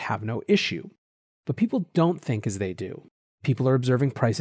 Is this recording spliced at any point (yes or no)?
no